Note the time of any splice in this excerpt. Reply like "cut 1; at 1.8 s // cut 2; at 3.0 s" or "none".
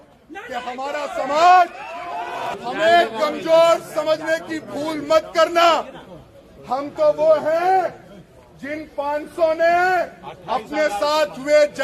cut 1; at 2.4 s